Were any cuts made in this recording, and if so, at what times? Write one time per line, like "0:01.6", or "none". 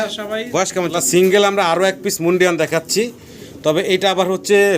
0:00.9